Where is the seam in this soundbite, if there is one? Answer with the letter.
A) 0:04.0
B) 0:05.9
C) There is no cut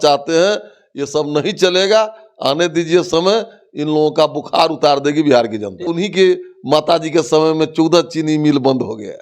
B